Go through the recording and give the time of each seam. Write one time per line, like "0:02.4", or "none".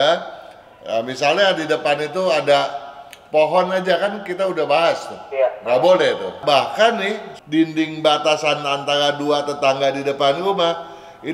0:06.4
0:07.3